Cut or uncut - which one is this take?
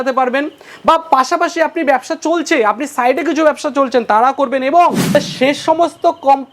cut